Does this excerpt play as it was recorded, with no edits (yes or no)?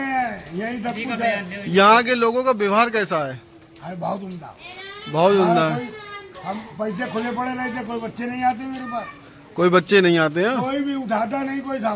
yes